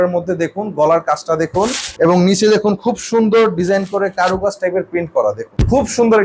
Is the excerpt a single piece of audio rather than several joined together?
yes; 0 cuts

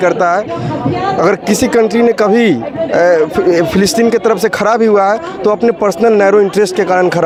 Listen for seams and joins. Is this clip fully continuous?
yes; 0 cuts

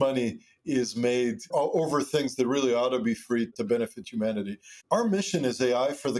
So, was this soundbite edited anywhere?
yes; 2 cuts; at 1.5 s, 4.8 s

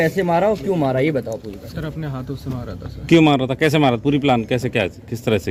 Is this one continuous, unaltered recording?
yes; 0 cuts

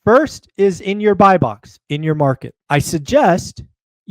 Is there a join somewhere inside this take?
yes; 1 cut; at 2.5 s

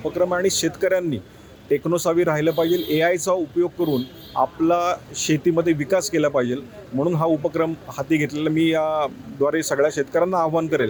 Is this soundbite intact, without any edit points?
yes; 0 cuts

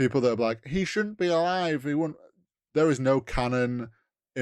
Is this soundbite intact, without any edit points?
yes; 0 cuts

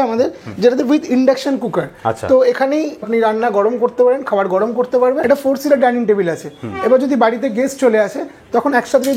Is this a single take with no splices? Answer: no; 2 cuts; at 3.1 s, 5.2 s

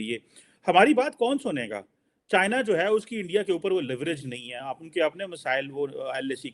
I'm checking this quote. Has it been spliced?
no; 0 cuts

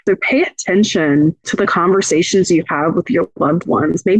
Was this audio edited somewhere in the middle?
no; 0 cuts

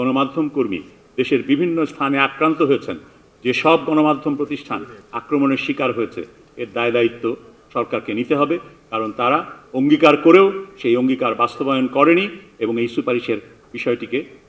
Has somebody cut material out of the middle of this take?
no; 0 cuts

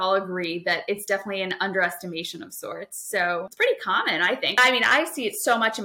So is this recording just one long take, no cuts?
no; 2 cuts; at 3.5 s, 4.5 s

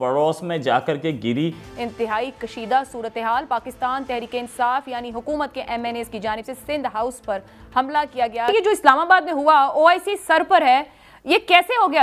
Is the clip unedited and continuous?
no; 2 cuts; at 1.7 s, 8.5 s

